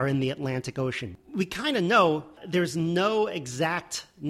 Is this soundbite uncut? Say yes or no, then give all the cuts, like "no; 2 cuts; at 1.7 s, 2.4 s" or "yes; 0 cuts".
no; 2 cuts; at 1.1 s, 2.4 s